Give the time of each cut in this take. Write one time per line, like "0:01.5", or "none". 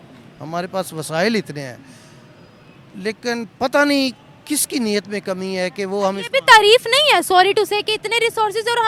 none